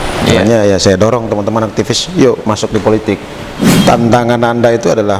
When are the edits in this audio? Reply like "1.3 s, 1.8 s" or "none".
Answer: 3.4 s